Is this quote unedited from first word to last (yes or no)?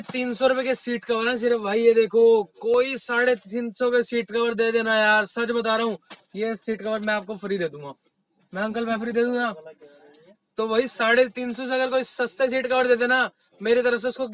yes